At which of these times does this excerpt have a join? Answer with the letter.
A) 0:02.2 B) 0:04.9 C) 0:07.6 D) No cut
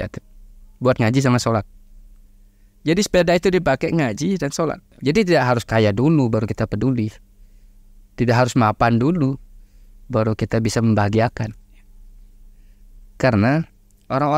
B